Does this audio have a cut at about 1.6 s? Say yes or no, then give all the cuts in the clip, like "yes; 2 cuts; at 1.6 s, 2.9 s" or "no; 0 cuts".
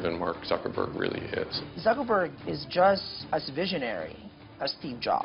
yes; 2 cuts; at 1.6 s, 3.1 s